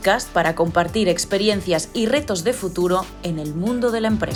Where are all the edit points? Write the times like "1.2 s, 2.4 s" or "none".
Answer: none